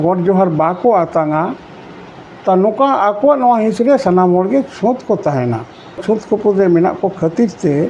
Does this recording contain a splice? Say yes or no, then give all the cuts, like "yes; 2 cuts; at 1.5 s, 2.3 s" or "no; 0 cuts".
yes; 1 cut; at 6.0 s